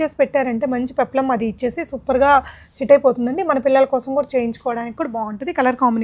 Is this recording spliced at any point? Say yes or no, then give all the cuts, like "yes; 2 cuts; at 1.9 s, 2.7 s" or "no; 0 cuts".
no; 0 cuts